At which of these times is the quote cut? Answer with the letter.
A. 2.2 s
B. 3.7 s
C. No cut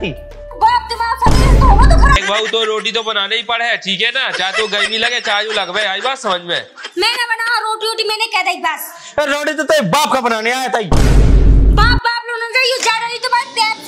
A